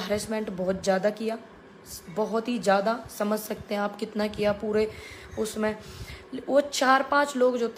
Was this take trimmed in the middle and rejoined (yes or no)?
no